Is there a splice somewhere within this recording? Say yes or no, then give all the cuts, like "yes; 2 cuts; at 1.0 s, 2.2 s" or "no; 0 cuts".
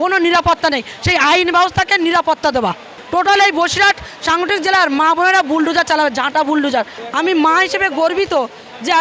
yes; 2 cuts; at 2.9 s, 6.9 s